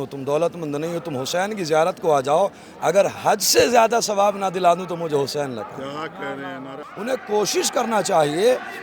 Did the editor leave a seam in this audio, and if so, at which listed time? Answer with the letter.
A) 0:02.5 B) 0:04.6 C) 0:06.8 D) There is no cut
C